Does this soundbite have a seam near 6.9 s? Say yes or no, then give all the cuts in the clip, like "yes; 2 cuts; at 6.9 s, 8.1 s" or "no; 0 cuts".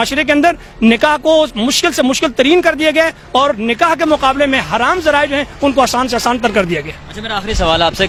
no; 0 cuts